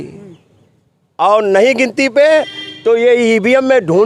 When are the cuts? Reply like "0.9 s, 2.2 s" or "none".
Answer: none